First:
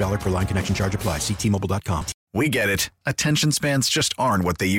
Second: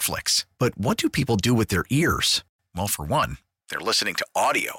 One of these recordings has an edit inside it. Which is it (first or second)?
first